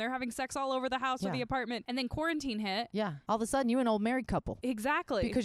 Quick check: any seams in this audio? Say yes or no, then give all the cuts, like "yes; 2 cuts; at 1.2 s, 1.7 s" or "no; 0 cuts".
yes; 3 cuts; at 1.8 s, 3.2 s, 4.5 s